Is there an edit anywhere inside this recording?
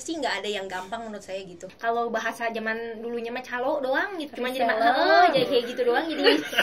yes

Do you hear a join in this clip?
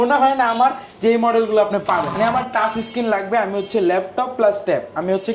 yes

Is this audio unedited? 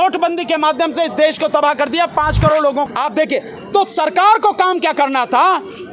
no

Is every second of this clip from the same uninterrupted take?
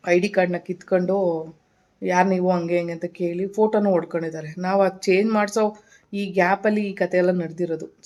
yes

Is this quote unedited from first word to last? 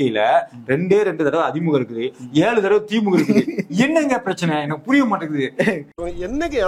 yes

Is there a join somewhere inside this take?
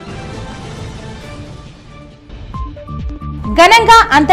yes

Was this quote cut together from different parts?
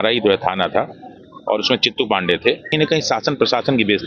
yes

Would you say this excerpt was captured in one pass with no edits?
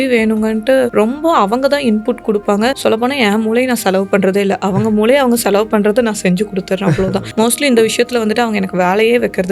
yes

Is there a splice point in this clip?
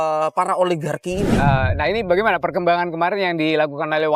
yes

